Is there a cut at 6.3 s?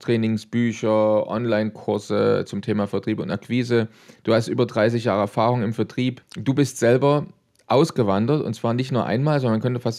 yes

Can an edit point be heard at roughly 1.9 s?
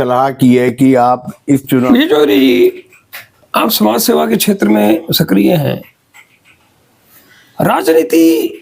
yes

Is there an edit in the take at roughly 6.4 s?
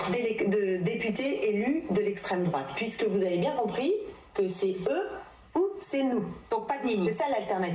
yes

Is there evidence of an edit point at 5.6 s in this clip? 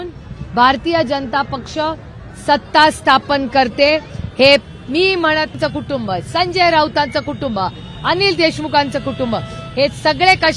yes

